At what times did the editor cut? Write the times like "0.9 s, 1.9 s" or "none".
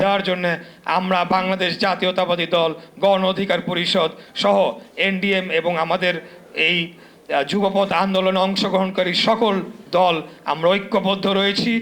none